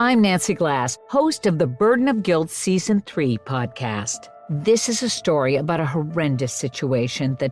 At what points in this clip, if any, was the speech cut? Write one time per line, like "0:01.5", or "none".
0:04.1